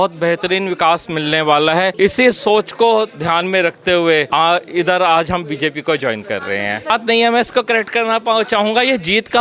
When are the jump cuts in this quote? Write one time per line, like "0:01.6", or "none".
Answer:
0:01.9
0:04.3
0:06.9